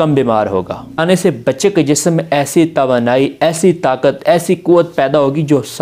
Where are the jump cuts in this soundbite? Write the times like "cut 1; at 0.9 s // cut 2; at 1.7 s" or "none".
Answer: cut 1; at 1.0 s